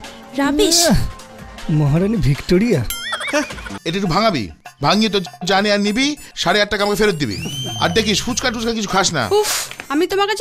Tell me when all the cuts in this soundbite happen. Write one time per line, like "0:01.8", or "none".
0:03.7